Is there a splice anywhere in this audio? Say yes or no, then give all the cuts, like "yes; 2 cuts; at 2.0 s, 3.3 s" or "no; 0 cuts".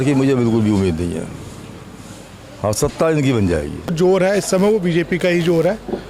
yes; 1 cut; at 3.9 s